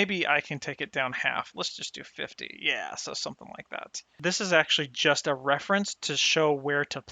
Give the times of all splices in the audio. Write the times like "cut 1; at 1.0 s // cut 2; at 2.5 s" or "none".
cut 1; at 4.1 s